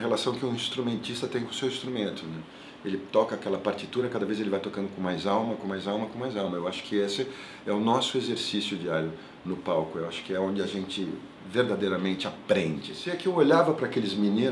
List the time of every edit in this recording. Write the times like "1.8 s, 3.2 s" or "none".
13.1 s